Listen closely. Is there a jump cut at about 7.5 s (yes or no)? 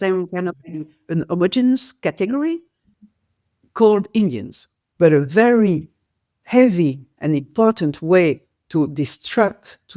no